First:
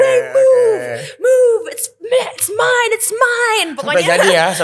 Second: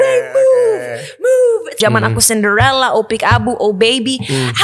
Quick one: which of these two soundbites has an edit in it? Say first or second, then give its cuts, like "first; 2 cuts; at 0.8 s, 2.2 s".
second; 1 cut; at 1.7 s